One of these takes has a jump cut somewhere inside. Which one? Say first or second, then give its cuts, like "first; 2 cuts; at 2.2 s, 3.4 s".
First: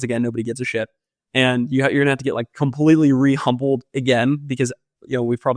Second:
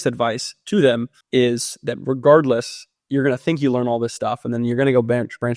second; 1 cut; at 1.1 s